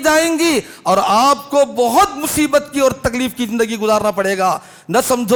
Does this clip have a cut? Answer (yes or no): no